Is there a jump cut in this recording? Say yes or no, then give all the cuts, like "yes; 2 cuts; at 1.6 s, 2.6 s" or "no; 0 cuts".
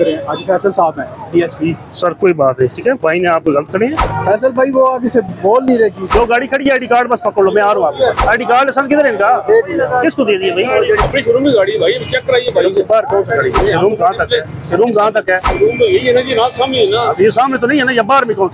yes; 6 cuts; at 4.1 s, 6.0 s, 8.2 s, 11.0 s, 13.6 s, 15.5 s